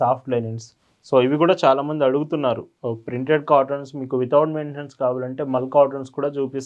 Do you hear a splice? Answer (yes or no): no